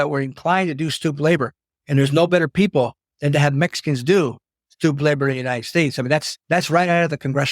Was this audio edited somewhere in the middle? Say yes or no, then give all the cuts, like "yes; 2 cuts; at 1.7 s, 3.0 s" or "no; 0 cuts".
yes; 1 cut; at 6.3 s